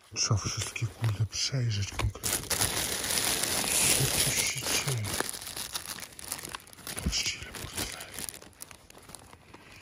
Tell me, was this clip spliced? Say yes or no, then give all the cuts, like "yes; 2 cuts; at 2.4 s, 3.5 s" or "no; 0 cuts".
no; 0 cuts